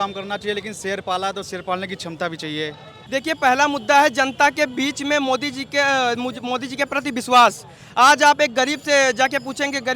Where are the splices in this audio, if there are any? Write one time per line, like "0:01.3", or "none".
0:02.9